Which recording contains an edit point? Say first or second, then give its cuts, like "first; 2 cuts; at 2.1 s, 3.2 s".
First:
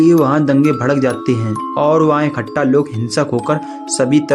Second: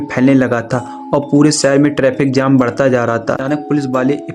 second; 1 cut; at 3.4 s